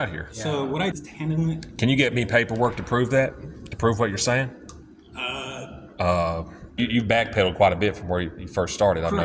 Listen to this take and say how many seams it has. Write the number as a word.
two